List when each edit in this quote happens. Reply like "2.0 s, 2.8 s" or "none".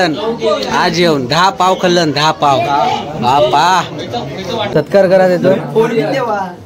4.7 s